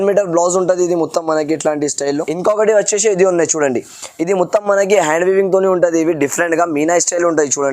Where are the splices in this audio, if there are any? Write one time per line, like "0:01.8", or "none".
0:02.3